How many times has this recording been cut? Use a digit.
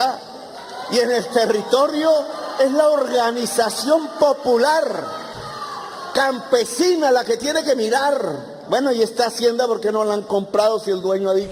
0